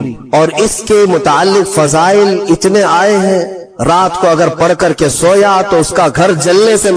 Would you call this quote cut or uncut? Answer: cut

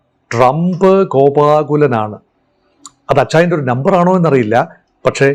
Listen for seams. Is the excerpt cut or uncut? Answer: uncut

